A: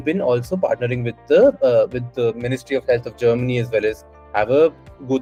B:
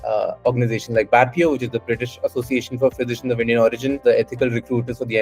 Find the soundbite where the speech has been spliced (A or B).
B